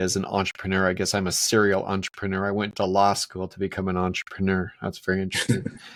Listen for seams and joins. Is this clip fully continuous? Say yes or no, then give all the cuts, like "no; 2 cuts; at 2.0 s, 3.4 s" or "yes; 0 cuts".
yes; 0 cuts